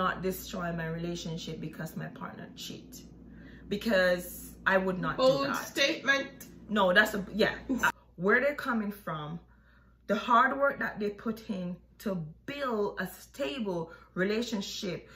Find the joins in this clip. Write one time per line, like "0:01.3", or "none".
0:07.9